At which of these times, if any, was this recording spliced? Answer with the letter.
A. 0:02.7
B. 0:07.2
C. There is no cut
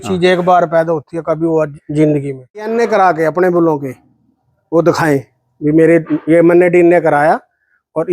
A